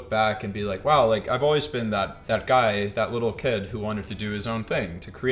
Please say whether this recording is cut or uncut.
cut